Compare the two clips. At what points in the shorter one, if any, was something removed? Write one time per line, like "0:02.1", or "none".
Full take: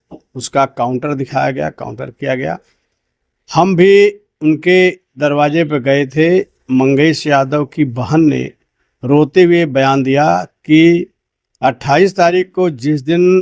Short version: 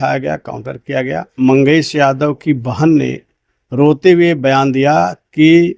0:01.3

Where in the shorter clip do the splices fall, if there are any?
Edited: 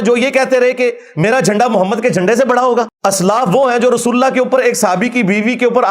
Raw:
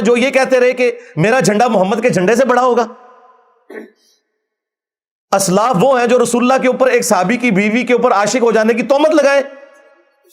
0:02.9

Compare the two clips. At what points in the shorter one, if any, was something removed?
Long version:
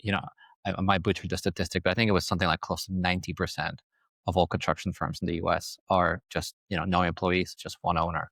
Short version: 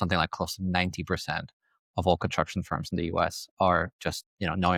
none

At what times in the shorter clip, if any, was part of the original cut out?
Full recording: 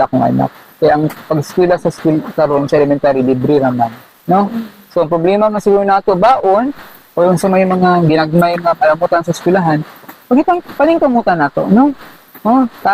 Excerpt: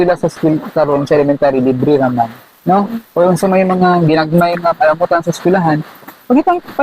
0:03.0

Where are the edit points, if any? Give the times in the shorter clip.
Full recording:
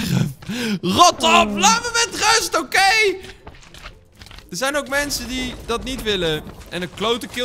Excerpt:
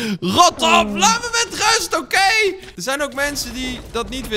0:02.7

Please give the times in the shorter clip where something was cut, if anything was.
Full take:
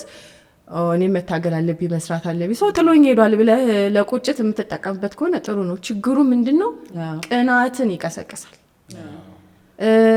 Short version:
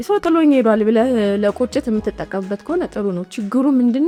none

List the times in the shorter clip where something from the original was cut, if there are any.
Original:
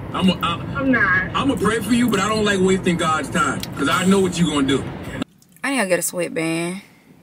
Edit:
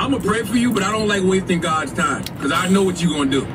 none

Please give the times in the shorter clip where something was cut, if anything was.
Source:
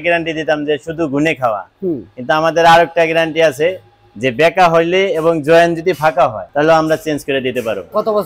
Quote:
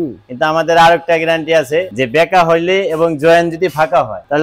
0:02.0

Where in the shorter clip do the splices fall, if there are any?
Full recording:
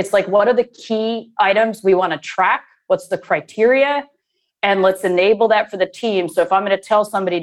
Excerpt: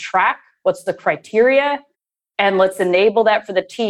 none

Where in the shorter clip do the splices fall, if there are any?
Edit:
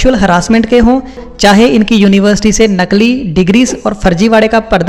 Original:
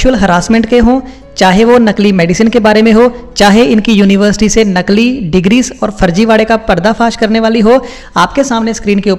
0:01.3

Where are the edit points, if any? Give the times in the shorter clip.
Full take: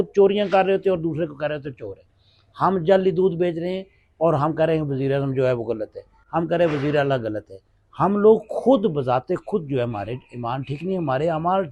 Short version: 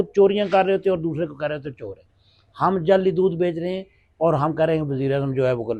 none

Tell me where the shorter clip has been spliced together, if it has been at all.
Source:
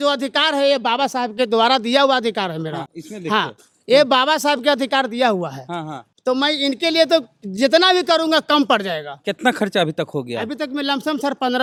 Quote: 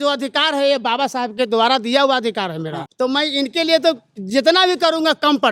0:02.8

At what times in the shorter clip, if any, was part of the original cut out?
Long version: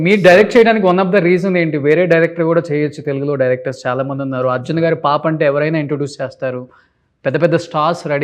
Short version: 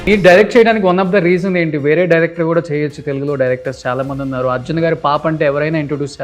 none

